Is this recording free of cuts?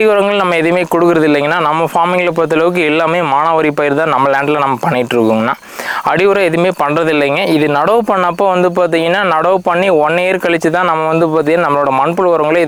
yes; 0 cuts

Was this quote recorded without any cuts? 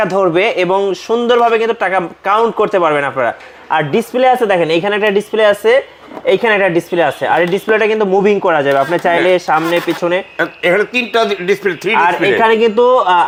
yes; 0 cuts

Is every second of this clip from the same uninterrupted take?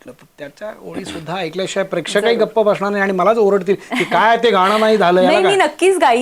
yes; 0 cuts

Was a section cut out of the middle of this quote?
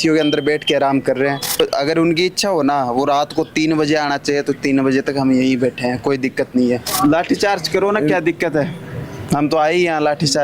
yes; 2 cuts; at 1.6 s, 6.9 s

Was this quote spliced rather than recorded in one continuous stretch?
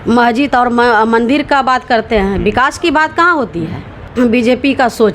yes; 1 cut; at 4.1 s

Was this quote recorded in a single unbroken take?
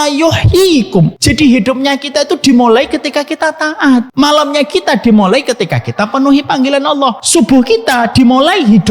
no; 3 cuts; at 1.2 s, 4.1 s, 7.2 s

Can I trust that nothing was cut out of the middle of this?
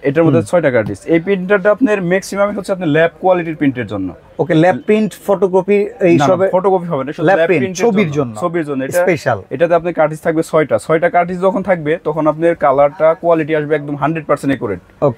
yes; 0 cuts

